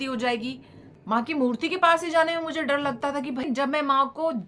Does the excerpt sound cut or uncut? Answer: cut